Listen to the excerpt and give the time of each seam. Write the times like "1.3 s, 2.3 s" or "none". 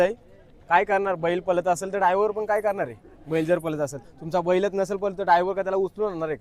none